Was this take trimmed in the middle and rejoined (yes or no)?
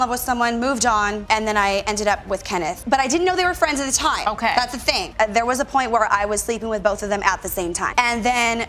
no